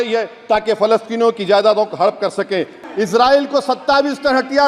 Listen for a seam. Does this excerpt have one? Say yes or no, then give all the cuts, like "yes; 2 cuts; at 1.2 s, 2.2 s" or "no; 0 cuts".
yes; 1 cut; at 2.8 s